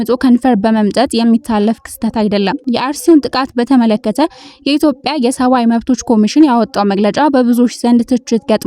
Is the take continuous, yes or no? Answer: no